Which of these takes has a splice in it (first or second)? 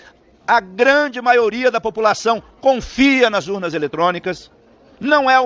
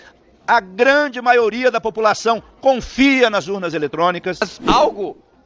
second